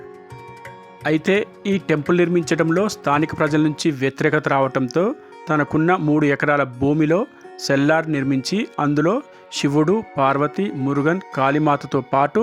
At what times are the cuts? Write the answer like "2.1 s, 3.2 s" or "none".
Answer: 1.0 s